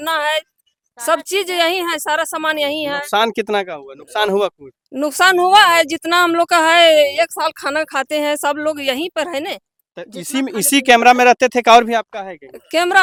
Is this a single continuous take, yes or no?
yes